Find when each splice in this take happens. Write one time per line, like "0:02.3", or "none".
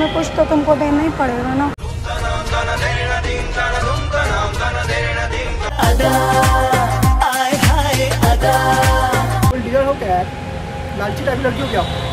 0:09.5